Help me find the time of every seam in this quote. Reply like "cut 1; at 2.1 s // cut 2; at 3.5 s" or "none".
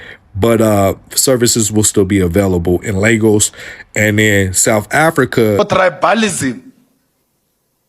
cut 1; at 5.6 s